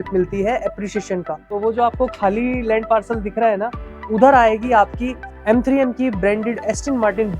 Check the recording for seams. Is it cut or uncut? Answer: cut